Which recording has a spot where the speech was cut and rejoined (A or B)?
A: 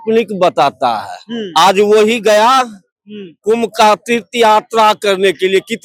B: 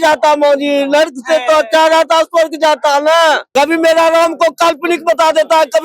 B